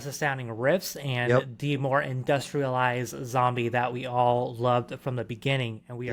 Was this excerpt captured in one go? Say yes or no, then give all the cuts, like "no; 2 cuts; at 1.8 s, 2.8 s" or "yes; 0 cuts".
yes; 0 cuts